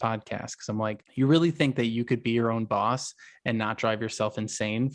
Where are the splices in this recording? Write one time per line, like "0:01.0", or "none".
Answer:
0:01.0